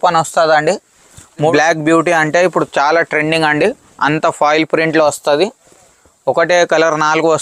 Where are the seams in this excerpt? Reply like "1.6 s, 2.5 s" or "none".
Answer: 1.5 s